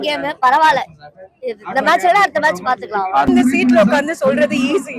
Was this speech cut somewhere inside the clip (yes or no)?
yes